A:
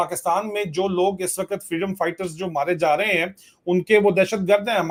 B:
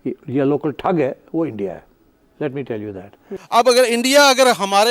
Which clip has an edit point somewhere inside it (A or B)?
B